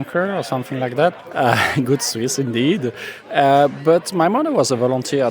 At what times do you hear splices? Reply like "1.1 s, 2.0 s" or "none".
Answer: 1.2 s